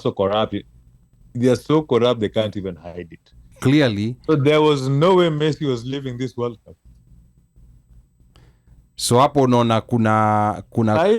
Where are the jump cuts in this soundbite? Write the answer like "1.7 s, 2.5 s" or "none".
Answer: 3.5 s